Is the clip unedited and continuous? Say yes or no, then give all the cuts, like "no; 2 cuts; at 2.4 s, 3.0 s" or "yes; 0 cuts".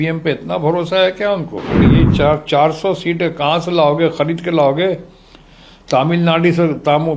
no; 1 cut; at 1.8 s